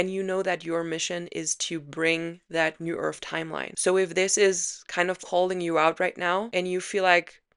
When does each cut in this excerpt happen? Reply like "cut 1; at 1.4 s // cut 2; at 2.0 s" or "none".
cut 1; at 3.7 s // cut 2; at 6.5 s